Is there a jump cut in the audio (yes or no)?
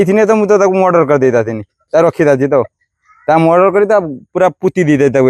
no